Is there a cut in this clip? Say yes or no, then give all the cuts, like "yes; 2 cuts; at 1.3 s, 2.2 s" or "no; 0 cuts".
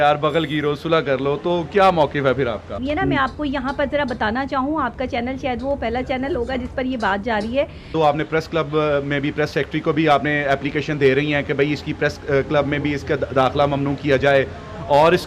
yes; 2 cuts; at 2.8 s, 7.9 s